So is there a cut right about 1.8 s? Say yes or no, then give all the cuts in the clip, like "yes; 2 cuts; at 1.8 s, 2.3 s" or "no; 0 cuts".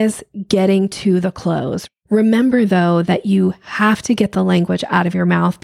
yes; 1 cut; at 1.8 s